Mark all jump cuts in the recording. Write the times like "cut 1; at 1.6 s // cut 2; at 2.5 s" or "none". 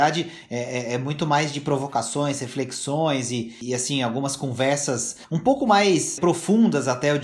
cut 1; at 3.6 s // cut 2; at 5.2 s // cut 3; at 6.2 s